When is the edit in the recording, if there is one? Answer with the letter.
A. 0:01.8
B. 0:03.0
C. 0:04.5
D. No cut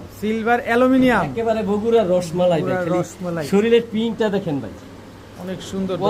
D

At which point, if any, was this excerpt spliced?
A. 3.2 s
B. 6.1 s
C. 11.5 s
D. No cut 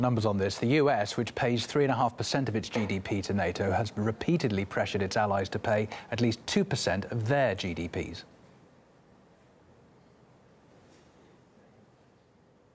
C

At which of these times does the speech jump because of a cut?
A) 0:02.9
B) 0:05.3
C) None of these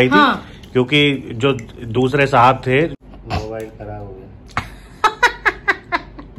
A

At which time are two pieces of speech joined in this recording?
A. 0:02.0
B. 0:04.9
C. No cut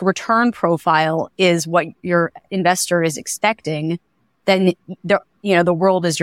A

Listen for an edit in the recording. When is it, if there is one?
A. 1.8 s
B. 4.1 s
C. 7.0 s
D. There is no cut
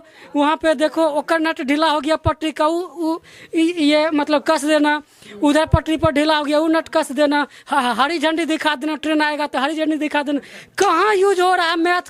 D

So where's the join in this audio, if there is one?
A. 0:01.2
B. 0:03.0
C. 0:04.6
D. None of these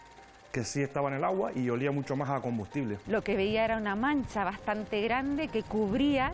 B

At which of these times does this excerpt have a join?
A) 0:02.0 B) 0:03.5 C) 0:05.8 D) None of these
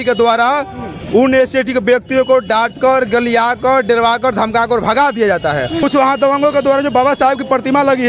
C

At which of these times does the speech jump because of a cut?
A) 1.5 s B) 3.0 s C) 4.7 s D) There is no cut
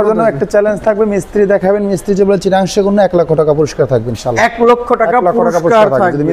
D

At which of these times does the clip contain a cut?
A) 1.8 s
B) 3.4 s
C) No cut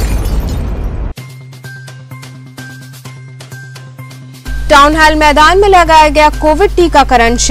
C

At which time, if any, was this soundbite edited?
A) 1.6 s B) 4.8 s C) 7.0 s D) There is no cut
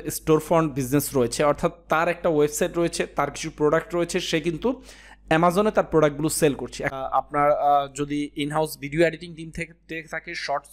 C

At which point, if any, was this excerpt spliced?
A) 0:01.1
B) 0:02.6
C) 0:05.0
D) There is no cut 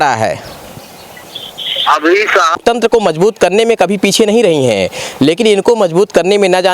B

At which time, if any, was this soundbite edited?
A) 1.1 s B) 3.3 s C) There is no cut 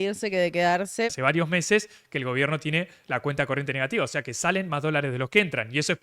A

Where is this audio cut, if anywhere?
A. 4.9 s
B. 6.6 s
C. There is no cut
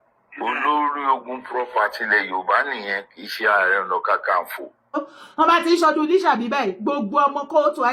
A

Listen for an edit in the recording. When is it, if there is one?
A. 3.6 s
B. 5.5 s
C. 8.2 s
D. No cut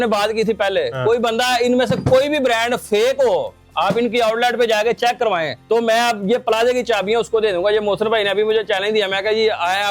B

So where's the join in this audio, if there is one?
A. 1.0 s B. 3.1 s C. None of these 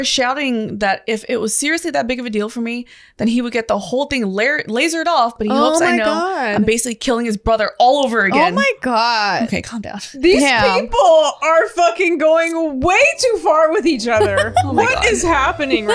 C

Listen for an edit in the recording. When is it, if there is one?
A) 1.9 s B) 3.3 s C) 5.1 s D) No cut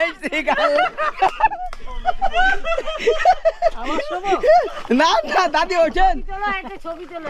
D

